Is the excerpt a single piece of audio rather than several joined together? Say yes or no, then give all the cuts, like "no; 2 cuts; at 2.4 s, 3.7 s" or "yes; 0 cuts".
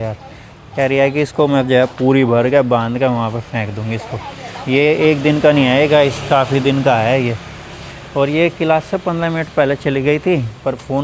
yes; 0 cuts